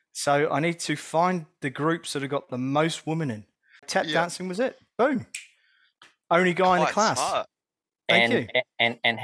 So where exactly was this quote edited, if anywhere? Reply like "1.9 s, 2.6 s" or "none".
3.9 s